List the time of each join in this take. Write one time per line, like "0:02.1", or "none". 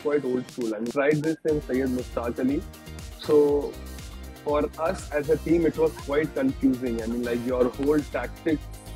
0:00.9